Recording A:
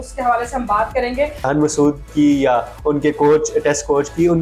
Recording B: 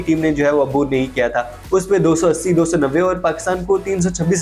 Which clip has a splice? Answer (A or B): A